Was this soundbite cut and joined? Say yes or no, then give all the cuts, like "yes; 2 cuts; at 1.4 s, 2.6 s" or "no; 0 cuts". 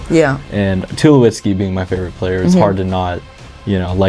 no; 0 cuts